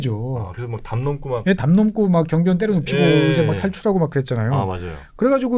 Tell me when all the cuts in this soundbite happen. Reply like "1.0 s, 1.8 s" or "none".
none